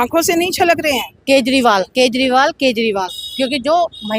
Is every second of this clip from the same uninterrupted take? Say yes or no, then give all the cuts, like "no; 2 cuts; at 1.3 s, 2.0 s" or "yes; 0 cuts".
no; 1 cut; at 1.1 s